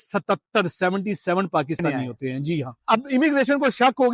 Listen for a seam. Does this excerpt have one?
yes; 1 cut; at 2.7 s

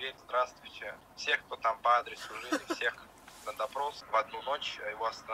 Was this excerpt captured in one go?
no; 1 cut; at 4.0 s

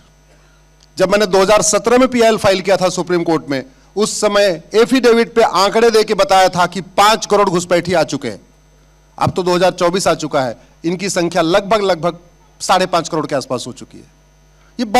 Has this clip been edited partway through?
no; 0 cuts

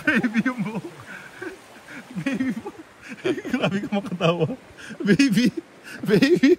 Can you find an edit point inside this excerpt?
no; 0 cuts

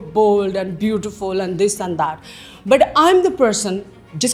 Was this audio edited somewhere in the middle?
no; 0 cuts

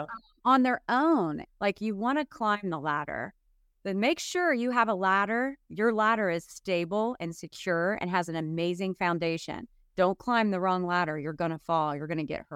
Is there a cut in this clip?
yes; 1 cut; at 1.4 s

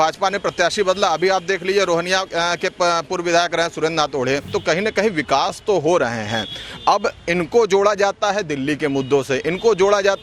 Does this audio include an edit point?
yes; 1 cut; at 4.5 s

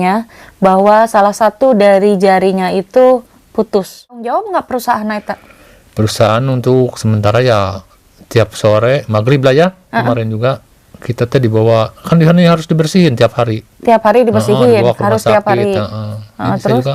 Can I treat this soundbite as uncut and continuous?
no; 1 cut; at 4.2 s

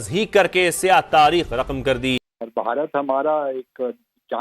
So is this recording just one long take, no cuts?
no; 1 cut; at 2.3 s

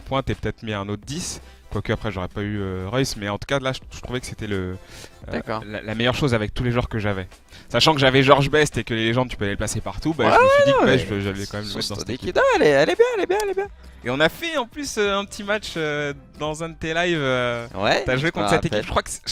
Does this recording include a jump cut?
no; 0 cuts

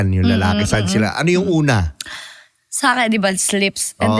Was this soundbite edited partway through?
no; 0 cuts

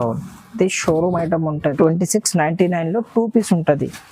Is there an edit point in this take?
yes; 1 cut; at 1.7 s

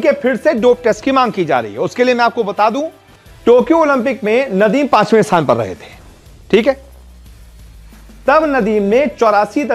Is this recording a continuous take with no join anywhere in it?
yes; 0 cuts

